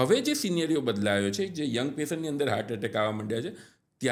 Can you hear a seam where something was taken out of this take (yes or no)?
no